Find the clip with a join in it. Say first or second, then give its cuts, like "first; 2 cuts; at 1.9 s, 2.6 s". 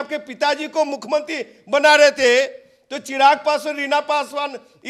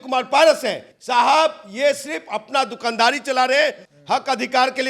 second; 2 cuts; at 0.9 s, 3.9 s